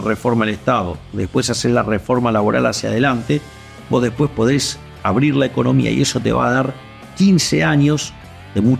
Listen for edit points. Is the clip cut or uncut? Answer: uncut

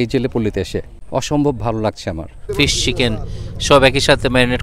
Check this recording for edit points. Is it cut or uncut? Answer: cut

